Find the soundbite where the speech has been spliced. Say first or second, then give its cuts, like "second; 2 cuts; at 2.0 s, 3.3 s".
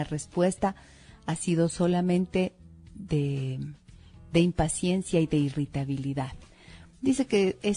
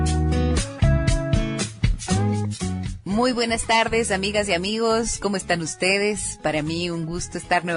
first; 1 cut; at 5.5 s